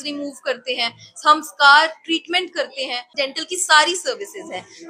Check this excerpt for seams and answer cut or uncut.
cut